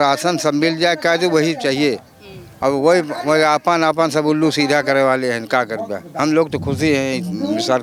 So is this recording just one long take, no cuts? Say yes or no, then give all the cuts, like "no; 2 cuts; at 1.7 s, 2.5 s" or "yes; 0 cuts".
yes; 0 cuts